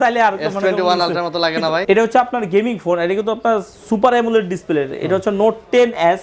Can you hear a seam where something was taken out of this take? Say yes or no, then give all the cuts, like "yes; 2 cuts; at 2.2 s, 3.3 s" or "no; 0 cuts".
yes; 1 cut; at 1.8 s